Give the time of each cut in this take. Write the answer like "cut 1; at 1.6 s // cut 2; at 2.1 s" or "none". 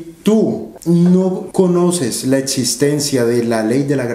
cut 1; at 0.9 s